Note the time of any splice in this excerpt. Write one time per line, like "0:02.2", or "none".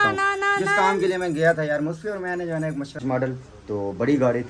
0:03.0